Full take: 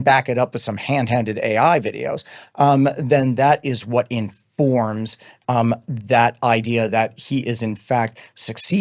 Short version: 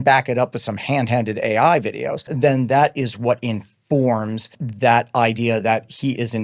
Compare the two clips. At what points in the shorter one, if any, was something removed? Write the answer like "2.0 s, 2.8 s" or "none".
2.3 s, 4.6 s